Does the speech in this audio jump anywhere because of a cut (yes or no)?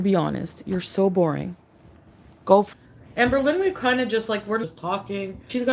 yes